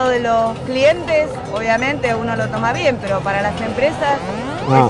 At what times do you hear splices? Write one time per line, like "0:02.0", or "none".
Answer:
none